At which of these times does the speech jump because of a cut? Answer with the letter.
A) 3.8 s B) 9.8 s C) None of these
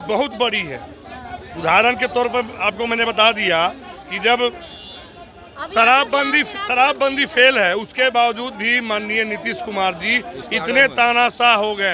C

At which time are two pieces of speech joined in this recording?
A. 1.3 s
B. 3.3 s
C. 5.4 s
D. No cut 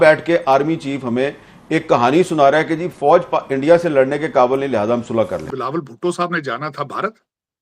C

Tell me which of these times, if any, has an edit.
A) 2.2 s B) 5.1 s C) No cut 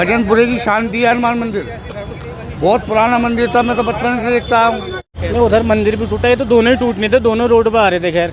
B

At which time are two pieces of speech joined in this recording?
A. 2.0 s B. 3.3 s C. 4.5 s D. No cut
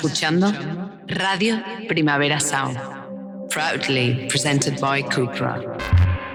D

